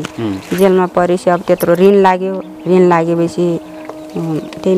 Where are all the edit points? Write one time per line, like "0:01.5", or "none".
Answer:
none